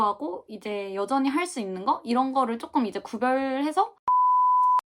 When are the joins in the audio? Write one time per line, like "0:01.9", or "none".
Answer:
0:03.9